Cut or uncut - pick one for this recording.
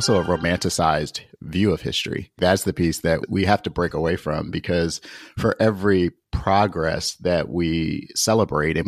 cut